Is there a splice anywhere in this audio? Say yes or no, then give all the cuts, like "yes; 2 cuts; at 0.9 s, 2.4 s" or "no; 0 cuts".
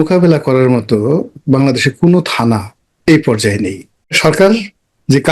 yes; 1 cut; at 4.2 s